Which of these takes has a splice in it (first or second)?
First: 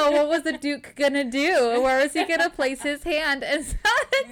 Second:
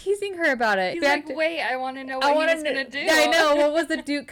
second